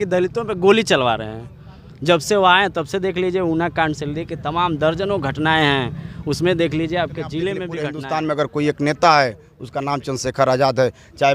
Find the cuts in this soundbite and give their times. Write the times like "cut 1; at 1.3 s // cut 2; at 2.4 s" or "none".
cut 1; at 7.8 s